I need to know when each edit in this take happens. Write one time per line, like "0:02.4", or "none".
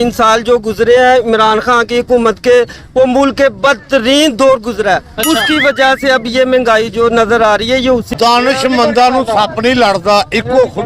0:08.1